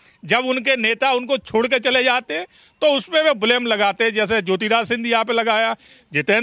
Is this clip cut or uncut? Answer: uncut